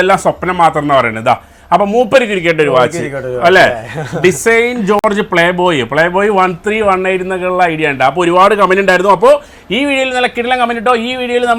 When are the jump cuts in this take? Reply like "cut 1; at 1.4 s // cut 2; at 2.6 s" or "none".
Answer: none